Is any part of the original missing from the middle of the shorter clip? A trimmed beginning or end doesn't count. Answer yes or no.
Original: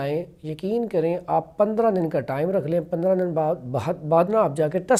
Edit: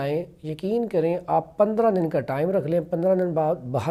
no